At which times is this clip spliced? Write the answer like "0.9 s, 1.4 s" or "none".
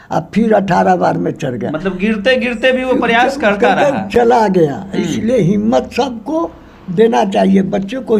none